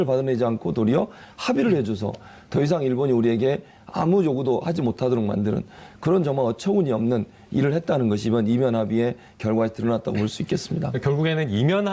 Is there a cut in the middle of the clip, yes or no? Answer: yes